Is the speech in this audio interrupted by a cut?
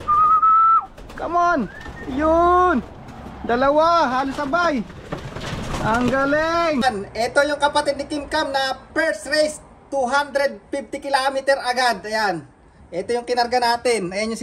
yes; 1 cut; at 6.8 s

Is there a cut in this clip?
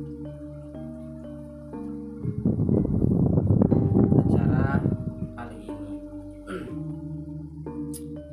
yes; 3 cuts; at 2.3 s, 5.2 s, 7.5 s

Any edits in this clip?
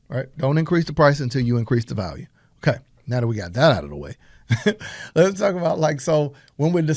no; 0 cuts

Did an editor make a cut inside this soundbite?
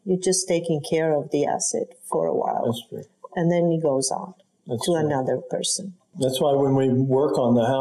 yes; 1 cut; at 6.1 s

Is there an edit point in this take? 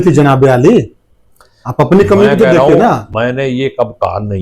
no; 0 cuts

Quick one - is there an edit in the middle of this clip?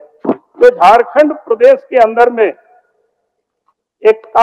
no; 0 cuts

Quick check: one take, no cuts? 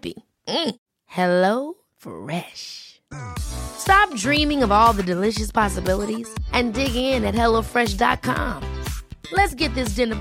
yes; 0 cuts

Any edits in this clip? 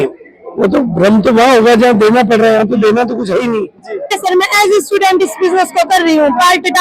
yes; 1 cut; at 4.2 s

